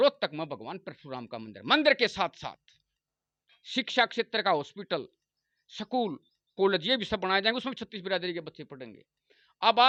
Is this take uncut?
yes; 0 cuts

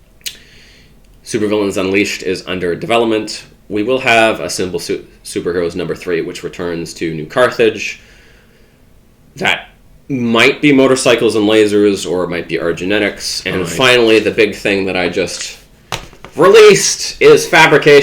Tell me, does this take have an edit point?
yes; 1 cut; at 13.3 s

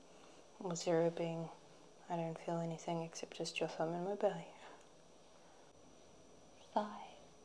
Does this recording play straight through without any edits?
no; 1 cut; at 5.7 s

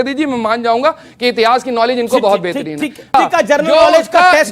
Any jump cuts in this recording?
yes; 1 cut; at 3.1 s

